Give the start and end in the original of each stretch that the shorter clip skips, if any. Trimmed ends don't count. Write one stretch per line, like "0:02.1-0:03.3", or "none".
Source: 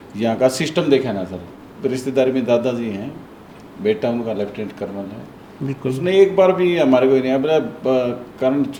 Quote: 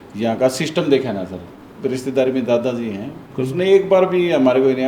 0:03.2-0:05.7